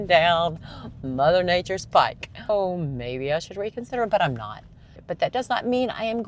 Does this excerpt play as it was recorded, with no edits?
no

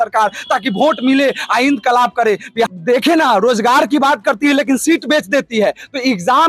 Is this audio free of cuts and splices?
no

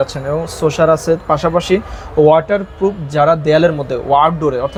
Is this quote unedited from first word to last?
yes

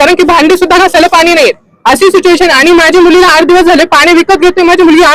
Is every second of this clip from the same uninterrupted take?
yes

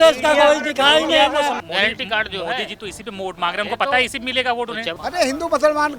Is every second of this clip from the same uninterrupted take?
no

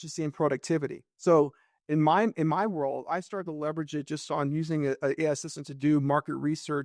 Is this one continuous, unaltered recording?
yes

